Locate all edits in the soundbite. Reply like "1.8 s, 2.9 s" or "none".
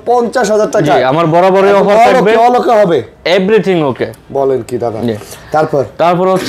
none